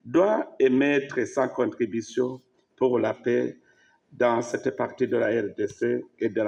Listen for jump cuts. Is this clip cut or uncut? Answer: uncut